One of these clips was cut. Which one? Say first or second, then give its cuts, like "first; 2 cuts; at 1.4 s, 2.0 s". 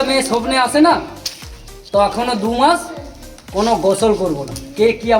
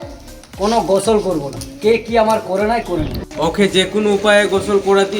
second; 1 cut; at 3.2 s